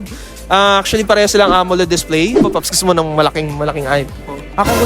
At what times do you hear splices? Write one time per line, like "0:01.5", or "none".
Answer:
0:02.5